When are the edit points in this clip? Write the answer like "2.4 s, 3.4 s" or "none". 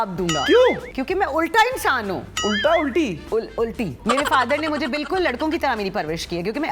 0.9 s, 3.9 s